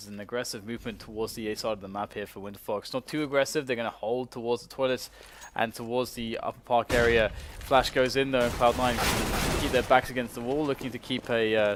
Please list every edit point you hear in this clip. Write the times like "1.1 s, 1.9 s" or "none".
none